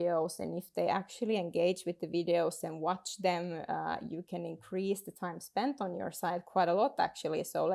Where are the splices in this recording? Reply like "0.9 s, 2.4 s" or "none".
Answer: none

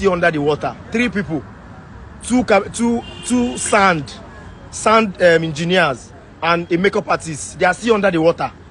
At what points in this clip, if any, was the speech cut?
none

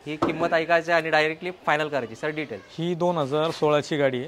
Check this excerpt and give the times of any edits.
none

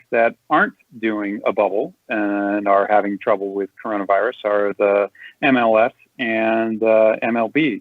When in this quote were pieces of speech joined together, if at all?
none

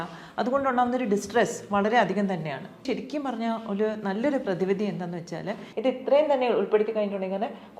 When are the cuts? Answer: 2.8 s, 5.6 s

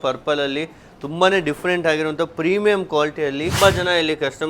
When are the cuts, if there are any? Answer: 3.5 s

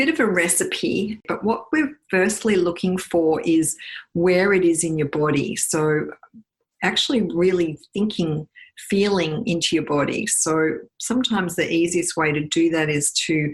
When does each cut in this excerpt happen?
1.2 s

